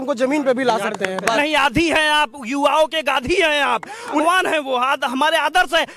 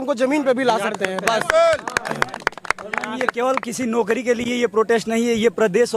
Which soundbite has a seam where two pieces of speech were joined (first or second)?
first